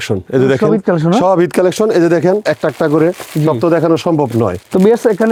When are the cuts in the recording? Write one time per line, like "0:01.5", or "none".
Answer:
none